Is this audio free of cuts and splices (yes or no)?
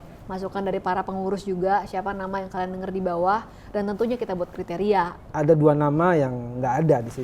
no